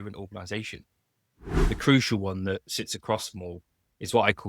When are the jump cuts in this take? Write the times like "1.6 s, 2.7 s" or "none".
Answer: 1.5 s